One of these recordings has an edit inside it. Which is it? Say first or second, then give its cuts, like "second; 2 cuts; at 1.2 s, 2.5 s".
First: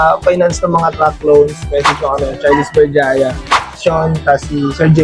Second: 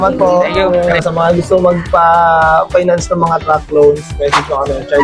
second; 1 cut; at 0.9 s